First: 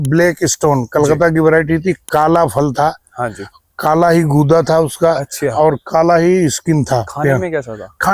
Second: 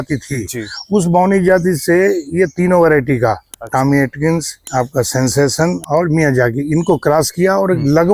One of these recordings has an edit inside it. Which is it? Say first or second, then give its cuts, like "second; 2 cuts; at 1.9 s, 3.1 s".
second; 2 cuts; at 4.6 s, 5.8 s